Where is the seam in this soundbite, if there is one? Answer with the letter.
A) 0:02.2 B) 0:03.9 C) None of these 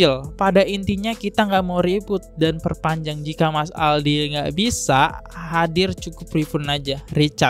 C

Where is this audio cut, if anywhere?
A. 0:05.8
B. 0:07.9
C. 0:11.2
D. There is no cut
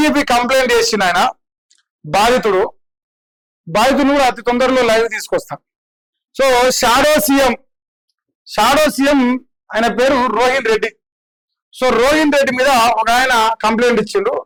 D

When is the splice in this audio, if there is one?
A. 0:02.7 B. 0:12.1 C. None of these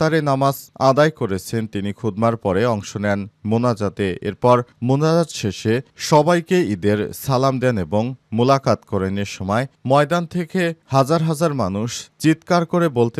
C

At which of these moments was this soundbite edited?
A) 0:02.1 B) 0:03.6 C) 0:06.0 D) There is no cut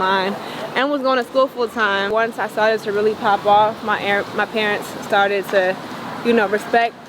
A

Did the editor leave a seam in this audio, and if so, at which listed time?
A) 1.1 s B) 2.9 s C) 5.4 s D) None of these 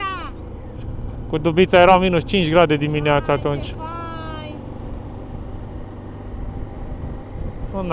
D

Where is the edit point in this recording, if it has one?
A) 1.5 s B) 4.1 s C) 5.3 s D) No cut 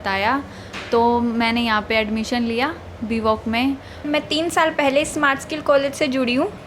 B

